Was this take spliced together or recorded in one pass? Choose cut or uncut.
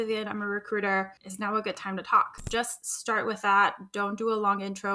cut